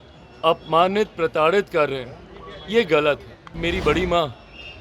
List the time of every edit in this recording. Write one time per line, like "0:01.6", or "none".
0:03.6

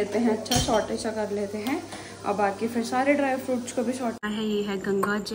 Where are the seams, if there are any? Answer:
0:04.2

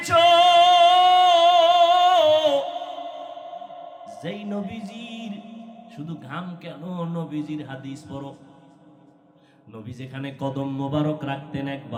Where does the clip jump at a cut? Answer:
none

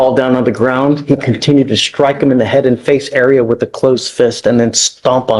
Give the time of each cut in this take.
none

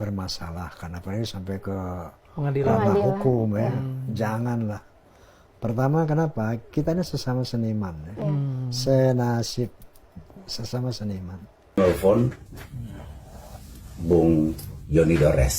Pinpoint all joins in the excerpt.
0:11.8

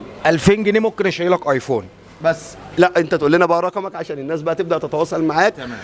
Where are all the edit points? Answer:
none

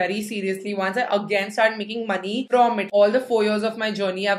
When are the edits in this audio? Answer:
none

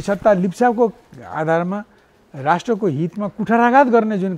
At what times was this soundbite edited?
none

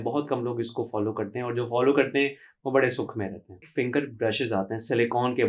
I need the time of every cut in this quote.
0:03.7

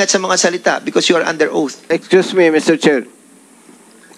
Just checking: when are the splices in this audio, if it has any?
0:01.9

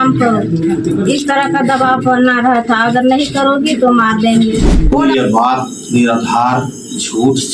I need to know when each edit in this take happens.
0:04.7

